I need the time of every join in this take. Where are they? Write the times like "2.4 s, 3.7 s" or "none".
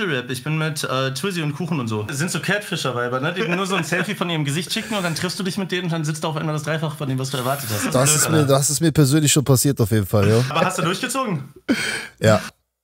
2.1 s, 10.5 s